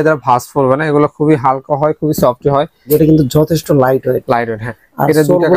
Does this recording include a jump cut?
yes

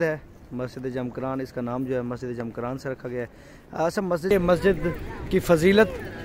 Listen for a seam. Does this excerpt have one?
yes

